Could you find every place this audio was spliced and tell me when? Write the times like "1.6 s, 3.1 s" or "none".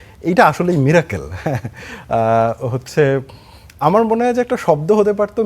none